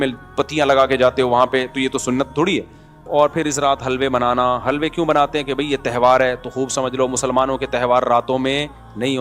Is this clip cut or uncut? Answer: cut